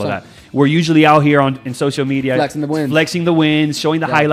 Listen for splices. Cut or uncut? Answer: uncut